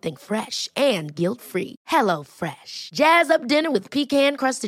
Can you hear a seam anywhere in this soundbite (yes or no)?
no